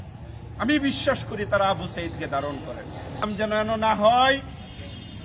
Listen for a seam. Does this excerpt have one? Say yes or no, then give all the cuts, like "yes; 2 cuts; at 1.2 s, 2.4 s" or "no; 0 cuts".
yes; 1 cut; at 3.3 s